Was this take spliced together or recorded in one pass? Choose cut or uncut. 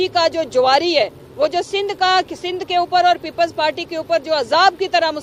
uncut